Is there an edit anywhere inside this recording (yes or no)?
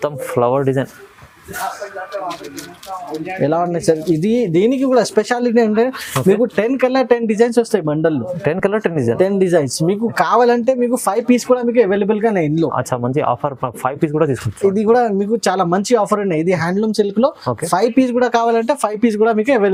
no